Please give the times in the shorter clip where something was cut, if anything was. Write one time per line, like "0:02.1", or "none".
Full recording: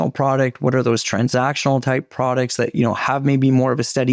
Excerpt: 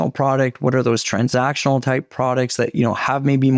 none